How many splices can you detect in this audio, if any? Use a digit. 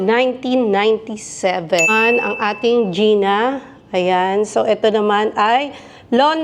1